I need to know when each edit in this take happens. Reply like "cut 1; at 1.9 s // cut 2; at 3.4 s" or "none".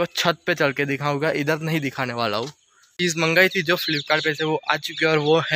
cut 1; at 2.9 s